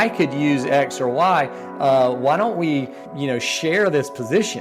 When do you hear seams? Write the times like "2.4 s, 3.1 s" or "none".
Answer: 3.0 s